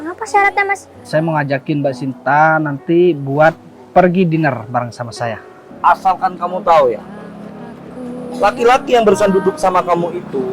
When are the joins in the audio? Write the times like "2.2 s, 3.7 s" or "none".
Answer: 1.1 s, 5.6 s